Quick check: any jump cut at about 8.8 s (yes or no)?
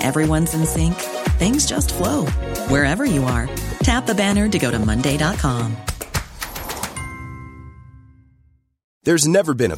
yes